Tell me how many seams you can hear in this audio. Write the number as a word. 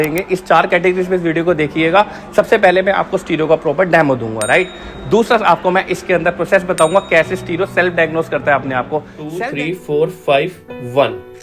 one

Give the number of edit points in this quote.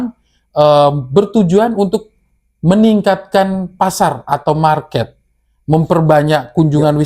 zero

